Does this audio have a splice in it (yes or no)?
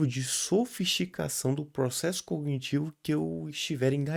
no